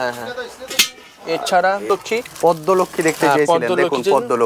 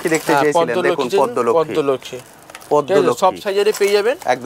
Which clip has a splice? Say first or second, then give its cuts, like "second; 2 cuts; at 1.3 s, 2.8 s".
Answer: first; 1 cut; at 1.9 s